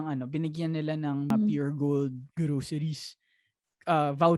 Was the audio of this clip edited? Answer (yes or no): yes